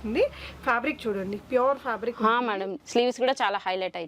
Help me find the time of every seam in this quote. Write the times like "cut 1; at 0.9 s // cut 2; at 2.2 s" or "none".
cut 1; at 2.7 s

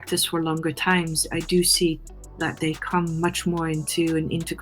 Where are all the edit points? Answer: none

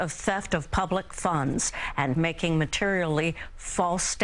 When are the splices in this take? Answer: cut 1; at 2.1 s

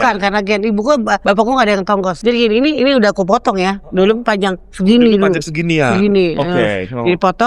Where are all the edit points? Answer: cut 1; at 1.2 s // cut 2; at 2.2 s

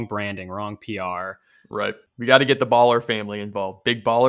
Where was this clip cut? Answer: cut 1; at 2.1 s

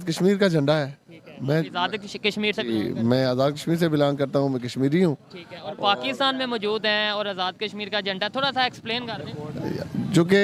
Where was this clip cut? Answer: none

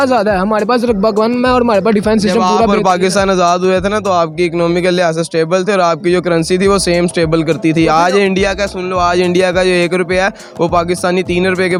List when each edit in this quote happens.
none

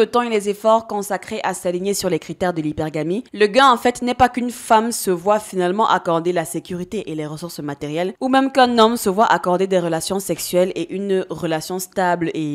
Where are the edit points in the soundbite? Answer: none

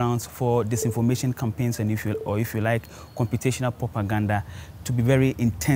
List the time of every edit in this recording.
none

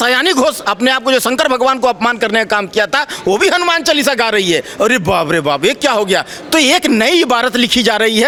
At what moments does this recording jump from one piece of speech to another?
none

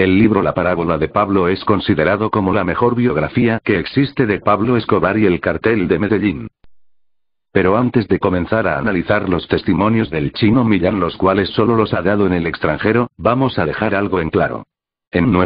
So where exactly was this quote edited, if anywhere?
none

